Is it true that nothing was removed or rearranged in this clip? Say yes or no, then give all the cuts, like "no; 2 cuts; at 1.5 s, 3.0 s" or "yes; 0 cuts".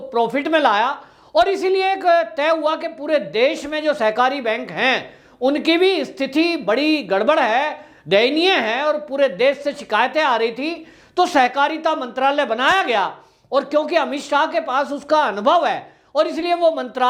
yes; 0 cuts